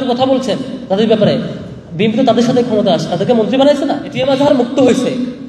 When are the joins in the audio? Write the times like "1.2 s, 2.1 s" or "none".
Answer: 4.1 s